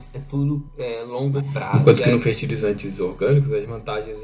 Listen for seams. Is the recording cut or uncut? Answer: cut